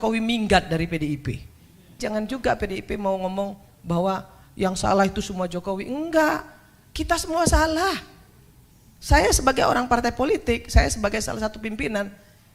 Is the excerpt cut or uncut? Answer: cut